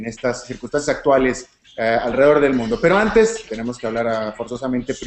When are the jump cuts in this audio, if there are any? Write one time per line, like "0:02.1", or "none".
0:02.3

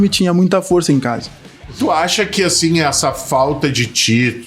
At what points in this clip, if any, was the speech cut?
0:01.7

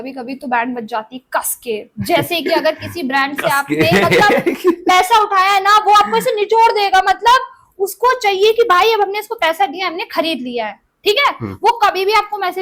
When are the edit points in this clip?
none

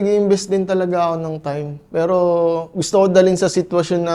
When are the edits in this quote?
none

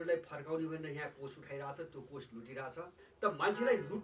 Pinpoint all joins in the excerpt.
0:03.0

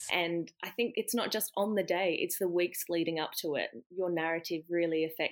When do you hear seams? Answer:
0:00.9

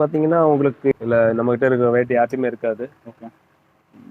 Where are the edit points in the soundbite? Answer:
0:00.9

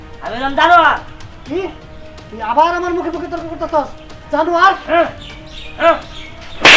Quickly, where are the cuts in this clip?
none

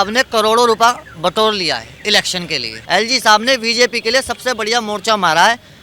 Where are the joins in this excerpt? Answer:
0:02.7

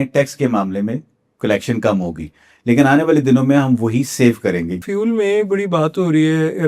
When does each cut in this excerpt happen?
0:04.8

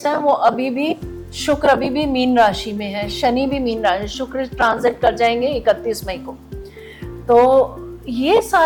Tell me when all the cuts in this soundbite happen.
none

